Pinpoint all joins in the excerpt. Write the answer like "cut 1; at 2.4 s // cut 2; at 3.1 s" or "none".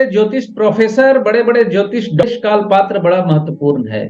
cut 1; at 2.2 s